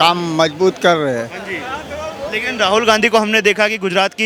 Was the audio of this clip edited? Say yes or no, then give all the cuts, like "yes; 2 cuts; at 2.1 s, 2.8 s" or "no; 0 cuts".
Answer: no; 0 cuts